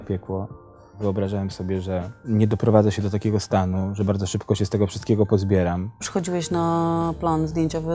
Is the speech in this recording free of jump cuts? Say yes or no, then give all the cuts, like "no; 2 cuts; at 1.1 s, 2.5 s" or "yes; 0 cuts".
no; 3 cuts; at 1.0 s, 2.1 s, 6.0 s